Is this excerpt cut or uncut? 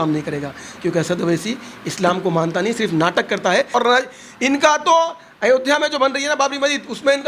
cut